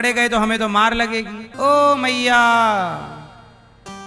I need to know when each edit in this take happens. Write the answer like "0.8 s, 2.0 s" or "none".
1.4 s